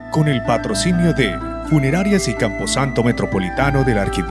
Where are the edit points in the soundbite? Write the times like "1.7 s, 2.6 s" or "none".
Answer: none